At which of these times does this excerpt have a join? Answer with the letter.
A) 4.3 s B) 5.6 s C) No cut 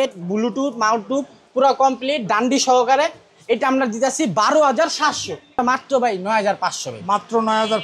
B